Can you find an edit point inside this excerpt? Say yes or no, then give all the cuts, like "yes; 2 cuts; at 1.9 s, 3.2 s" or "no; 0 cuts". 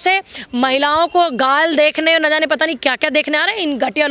no; 0 cuts